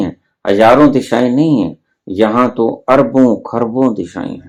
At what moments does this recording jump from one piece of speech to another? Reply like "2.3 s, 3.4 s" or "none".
none